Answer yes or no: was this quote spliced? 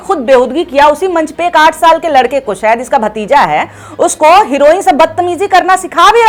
no